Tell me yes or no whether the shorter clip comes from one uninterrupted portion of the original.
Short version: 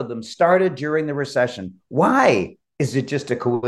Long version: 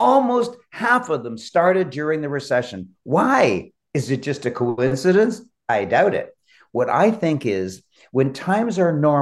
yes